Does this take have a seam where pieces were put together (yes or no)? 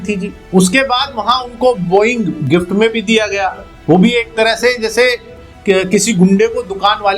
no